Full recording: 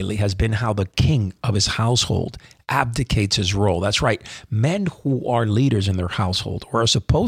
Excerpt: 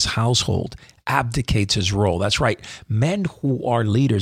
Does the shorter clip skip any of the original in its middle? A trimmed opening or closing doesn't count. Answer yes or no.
no